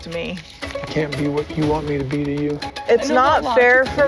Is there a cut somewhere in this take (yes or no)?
yes